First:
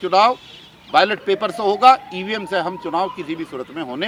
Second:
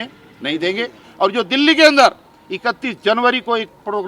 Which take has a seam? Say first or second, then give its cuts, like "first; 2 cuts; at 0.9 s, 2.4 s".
second; 1 cut; at 1.0 s